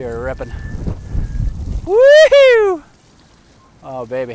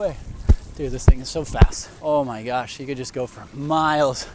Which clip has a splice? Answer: second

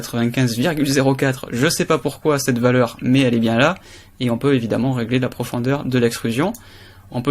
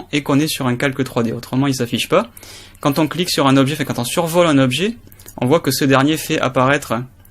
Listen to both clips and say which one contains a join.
first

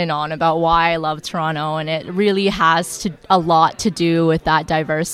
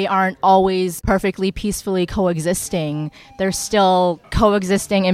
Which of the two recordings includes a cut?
second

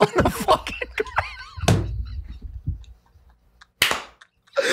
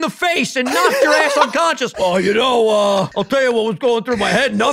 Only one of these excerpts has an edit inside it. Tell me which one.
second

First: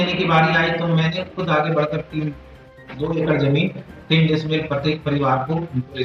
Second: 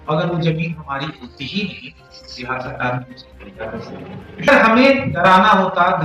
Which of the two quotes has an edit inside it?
second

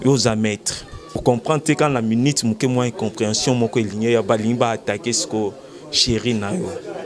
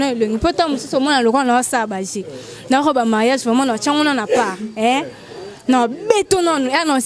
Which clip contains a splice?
first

